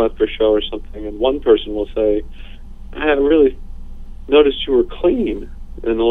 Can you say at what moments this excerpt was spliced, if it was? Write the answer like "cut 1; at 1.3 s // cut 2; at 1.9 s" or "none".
none